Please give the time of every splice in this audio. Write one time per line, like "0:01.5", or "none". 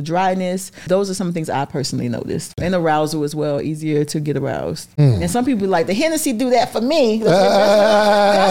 0:00.8
0:02.5
0:05.0